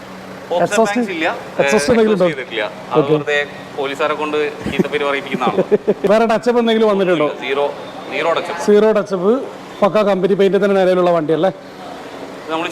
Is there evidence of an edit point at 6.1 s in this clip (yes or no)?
yes